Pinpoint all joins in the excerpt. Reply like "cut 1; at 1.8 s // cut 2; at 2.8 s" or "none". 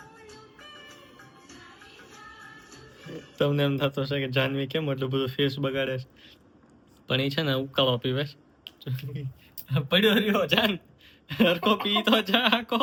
none